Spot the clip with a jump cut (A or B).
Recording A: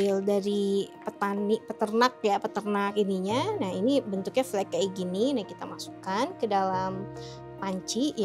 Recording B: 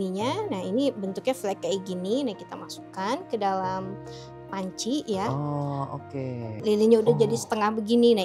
B